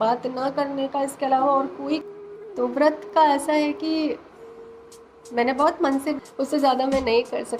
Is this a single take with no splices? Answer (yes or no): no